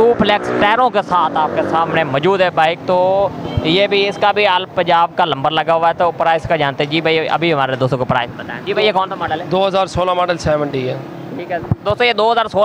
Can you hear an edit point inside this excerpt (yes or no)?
yes